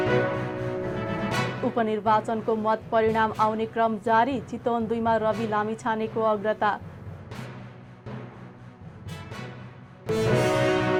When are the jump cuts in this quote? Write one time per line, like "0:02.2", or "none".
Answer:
none